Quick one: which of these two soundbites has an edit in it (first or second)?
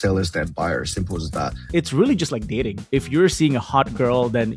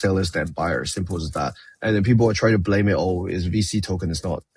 first